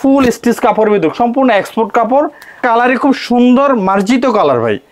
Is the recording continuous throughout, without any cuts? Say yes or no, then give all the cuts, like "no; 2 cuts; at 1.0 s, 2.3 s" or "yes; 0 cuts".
no; 1 cut; at 2.6 s